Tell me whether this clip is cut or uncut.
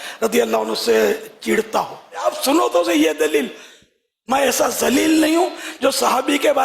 cut